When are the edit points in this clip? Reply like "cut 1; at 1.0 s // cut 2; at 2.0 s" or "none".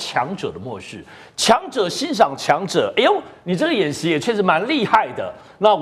none